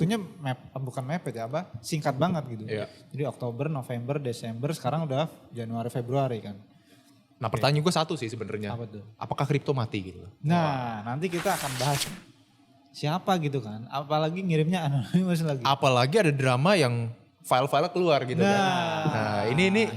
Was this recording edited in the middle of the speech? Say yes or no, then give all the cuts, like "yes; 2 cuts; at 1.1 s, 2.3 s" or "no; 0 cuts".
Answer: yes; 1 cut; at 12.1 s